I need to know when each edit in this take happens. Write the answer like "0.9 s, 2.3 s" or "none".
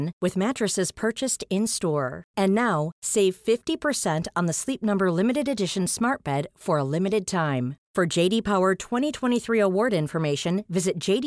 none